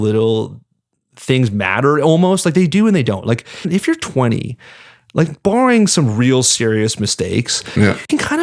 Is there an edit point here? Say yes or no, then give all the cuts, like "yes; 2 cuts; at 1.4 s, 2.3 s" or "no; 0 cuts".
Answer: yes; 1 cut; at 3.7 s